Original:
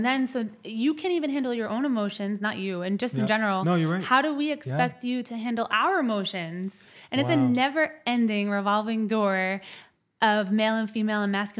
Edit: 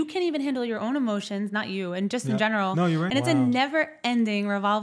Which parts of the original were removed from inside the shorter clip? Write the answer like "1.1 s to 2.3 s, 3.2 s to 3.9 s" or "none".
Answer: 4.0 s to 7.1 s